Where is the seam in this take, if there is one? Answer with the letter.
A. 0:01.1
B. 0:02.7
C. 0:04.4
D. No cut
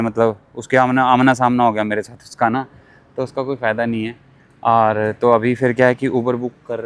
D